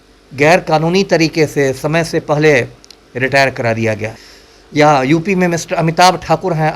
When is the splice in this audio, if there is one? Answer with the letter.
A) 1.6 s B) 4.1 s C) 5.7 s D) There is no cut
B